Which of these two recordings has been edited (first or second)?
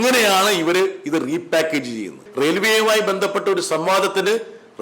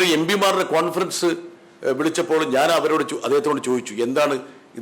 first